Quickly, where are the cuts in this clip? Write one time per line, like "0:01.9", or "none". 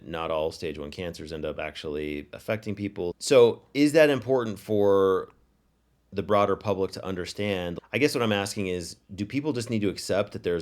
0:03.2
0:07.7